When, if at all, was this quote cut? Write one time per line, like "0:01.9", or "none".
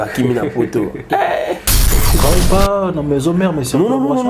0:02.1